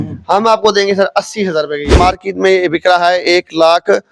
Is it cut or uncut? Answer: cut